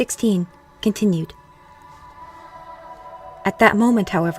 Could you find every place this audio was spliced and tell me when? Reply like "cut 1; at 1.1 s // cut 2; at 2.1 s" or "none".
cut 1; at 2.0 s